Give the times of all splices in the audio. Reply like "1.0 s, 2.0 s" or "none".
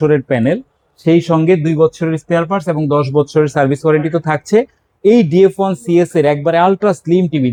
none